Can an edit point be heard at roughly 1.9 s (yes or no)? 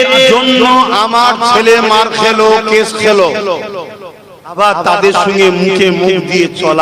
no